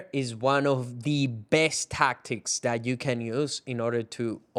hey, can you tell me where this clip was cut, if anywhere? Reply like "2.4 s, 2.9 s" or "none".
none